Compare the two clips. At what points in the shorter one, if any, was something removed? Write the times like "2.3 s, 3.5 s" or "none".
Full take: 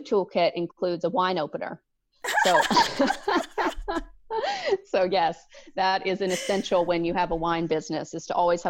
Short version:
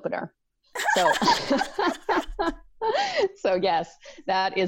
none